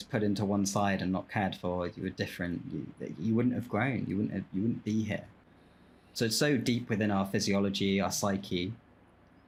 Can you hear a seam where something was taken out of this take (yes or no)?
no